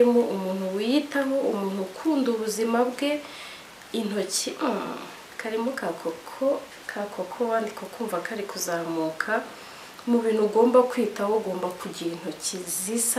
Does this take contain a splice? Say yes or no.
no